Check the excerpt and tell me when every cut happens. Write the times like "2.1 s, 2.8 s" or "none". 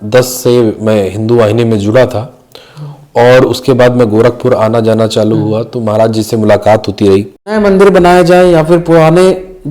7.6 s